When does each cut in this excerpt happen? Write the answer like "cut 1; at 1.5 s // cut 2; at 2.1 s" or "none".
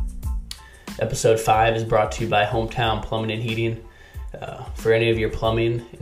cut 1; at 0.9 s